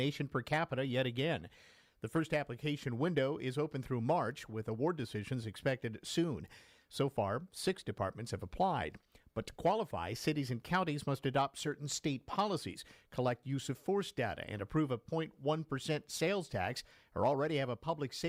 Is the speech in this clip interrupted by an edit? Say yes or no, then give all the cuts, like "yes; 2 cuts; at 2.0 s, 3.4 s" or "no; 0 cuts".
no; 0 cuts